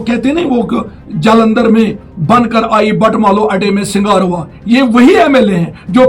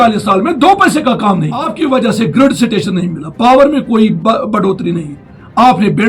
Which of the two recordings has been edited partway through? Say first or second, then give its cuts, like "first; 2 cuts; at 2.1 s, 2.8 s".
second; 1 cut; at 1.7 s